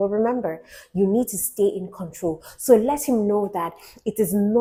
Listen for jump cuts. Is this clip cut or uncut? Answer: uncut